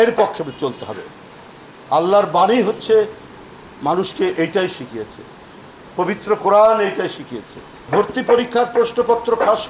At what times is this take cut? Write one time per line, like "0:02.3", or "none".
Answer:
0:07.9